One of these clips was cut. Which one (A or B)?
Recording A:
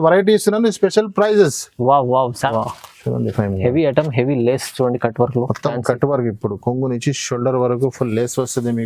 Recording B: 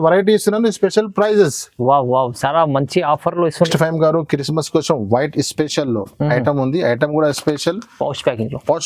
A